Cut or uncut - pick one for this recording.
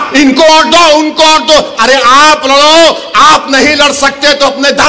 uncut